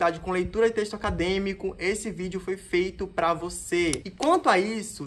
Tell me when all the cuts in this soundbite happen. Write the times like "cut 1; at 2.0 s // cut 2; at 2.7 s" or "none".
cut 1; at 4.0 s